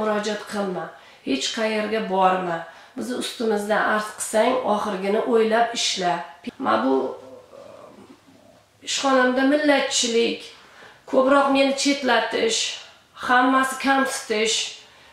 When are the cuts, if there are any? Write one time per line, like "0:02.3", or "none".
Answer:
0:06.3